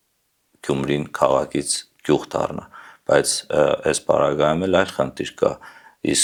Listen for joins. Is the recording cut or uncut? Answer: uncut